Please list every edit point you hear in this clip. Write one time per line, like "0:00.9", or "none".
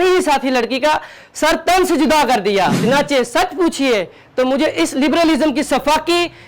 0:02.8